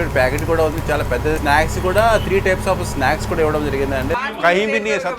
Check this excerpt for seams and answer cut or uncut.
cut